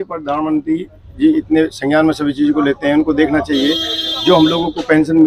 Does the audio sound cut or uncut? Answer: uncut